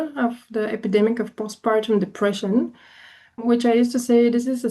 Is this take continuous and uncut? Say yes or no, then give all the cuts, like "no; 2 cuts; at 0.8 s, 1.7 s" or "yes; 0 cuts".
no; 1 cut; at 3.4 s